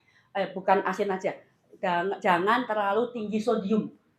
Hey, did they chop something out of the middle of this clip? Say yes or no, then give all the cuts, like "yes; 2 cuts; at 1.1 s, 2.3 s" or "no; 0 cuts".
no; 0 cuts